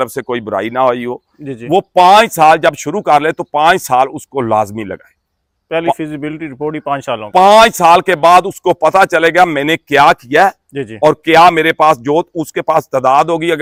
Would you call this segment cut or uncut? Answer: uncut